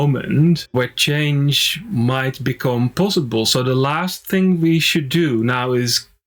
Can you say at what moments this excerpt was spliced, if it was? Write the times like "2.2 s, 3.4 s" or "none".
none